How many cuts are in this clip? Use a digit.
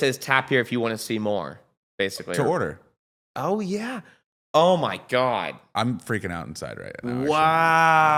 0